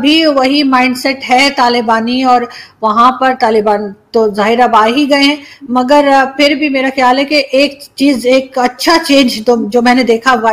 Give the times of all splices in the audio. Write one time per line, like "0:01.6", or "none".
none